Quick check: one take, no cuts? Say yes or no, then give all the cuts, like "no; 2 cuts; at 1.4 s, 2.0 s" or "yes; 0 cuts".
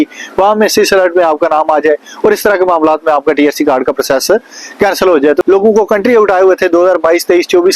no; 1 cut; at 5.4 s